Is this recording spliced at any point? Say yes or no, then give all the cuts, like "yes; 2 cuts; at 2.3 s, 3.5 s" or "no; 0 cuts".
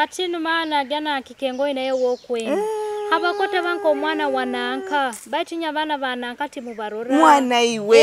no; 0 cuts